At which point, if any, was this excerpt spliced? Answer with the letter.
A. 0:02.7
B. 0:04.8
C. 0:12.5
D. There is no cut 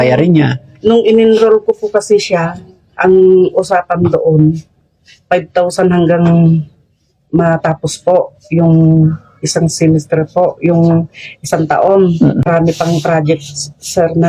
C